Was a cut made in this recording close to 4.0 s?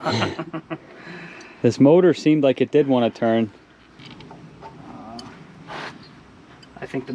yes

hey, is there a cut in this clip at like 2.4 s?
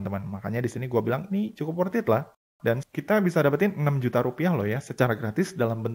yes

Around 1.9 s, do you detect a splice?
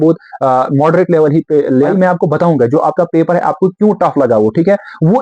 yes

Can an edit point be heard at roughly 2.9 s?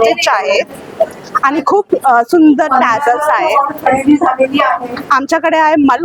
no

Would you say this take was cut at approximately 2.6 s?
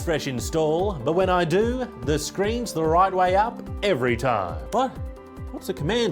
no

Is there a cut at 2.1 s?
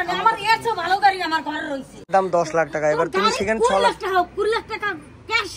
yes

